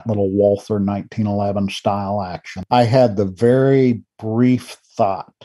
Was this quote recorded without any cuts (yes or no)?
no